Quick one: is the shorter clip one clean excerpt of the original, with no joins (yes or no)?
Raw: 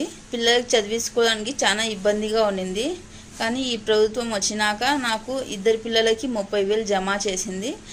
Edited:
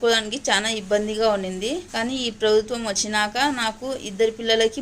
no